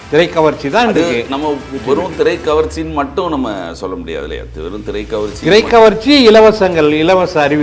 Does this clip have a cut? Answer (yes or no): no